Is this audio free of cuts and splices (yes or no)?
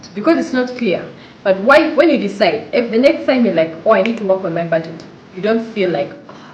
no